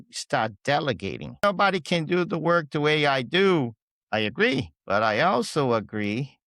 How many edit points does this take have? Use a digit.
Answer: 2